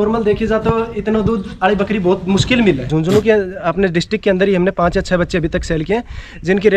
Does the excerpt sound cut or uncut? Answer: cut